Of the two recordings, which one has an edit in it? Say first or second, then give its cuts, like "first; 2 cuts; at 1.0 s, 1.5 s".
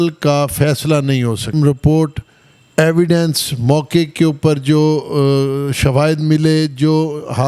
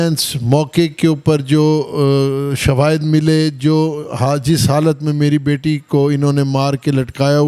first; 1 cut; at 1.5 s